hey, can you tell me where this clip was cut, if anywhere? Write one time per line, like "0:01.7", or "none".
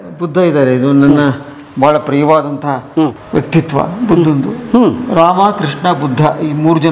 none